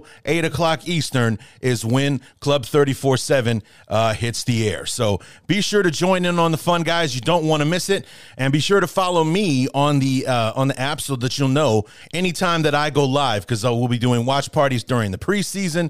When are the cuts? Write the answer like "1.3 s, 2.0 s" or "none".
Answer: none